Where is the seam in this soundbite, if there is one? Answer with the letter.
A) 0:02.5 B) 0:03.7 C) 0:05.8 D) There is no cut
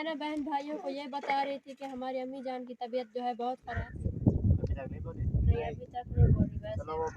B